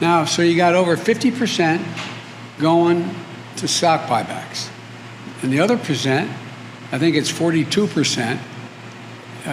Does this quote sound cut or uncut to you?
uncut